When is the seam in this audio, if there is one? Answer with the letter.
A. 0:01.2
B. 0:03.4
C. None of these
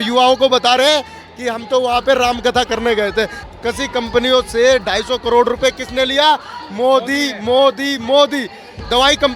B